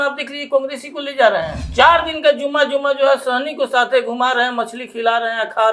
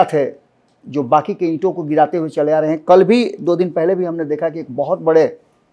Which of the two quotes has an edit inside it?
first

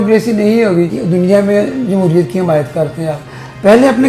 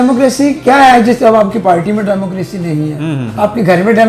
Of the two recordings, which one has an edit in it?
first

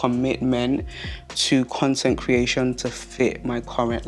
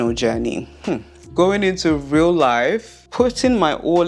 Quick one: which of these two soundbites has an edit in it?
second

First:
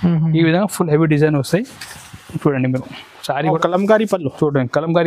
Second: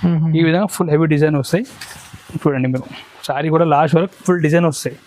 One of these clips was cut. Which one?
first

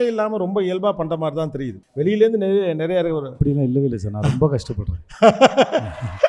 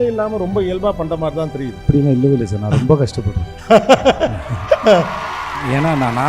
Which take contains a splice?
second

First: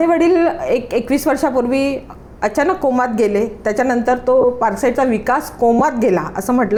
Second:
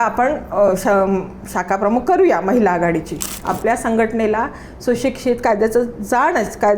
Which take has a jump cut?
second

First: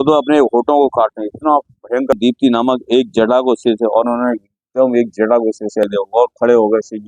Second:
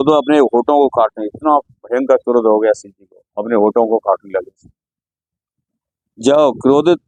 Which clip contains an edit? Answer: first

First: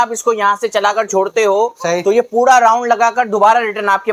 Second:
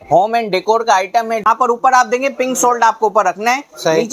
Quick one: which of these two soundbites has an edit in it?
second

